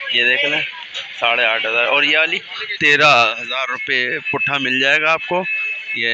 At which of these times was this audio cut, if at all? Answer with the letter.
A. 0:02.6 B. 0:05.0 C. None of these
A